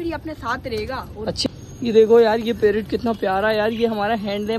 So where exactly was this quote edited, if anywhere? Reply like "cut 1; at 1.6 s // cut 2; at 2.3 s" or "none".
cut 1; at 1.5 s